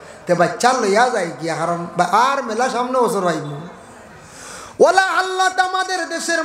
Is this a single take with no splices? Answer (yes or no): yes